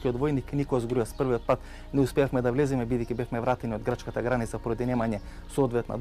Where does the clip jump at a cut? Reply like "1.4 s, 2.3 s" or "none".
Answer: none